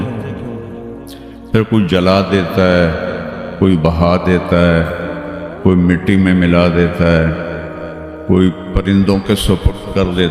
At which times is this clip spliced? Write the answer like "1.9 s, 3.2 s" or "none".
none